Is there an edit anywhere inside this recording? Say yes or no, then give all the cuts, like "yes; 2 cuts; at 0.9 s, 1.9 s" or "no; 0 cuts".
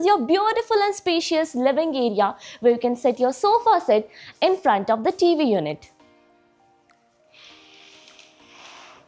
no; 0 cuts